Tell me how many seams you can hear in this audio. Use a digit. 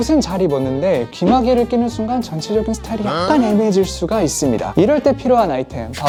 0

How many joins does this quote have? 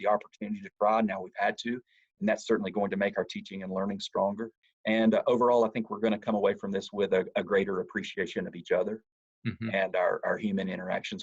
1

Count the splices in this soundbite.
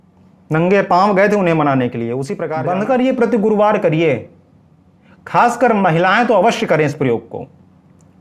1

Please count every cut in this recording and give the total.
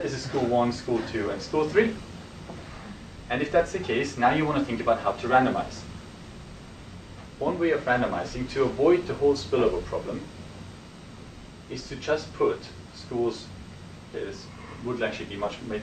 1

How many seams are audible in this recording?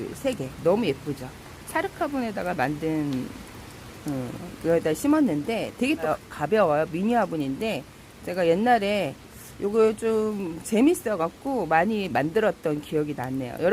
1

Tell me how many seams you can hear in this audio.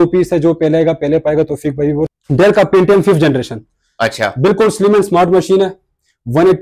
1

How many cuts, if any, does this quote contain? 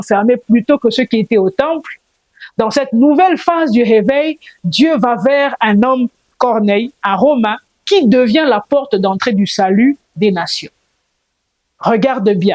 0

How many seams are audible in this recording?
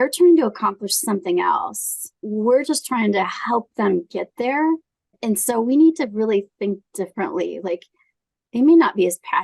2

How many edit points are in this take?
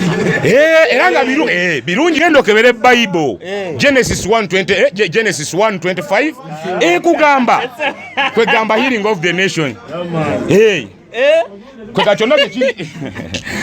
1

